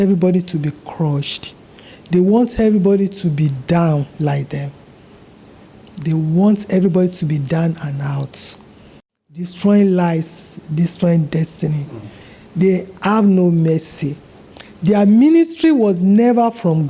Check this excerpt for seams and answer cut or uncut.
uncut